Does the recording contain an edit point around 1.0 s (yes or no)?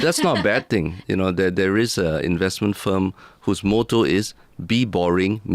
yes